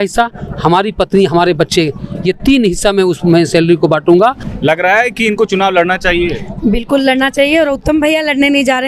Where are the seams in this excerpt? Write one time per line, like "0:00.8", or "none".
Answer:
0:04.5